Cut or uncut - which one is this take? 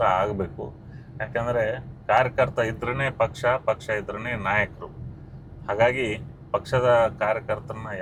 uncut